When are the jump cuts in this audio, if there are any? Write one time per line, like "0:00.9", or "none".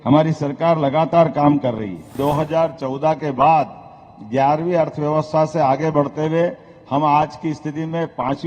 0:02.1